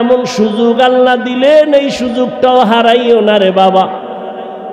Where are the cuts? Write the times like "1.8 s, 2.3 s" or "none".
none